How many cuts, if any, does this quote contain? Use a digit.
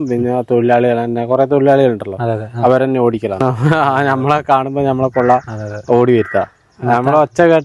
1